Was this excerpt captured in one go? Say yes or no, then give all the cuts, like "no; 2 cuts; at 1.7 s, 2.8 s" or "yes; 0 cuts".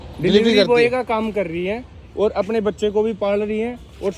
yes; 0 cuts